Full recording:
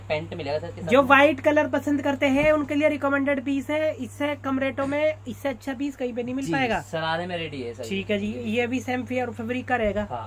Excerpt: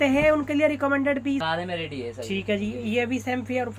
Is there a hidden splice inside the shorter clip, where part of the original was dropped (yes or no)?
yes